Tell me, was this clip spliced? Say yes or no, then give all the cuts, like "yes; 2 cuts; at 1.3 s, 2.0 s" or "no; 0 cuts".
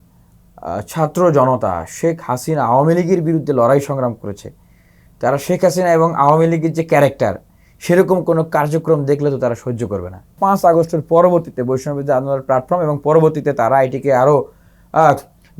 yes; 1 cut; at 10.4 s